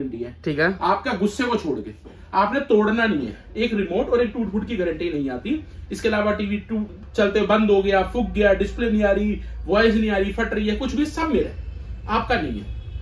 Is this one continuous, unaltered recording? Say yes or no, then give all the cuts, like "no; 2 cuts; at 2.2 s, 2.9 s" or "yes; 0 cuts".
yes; 0 cuts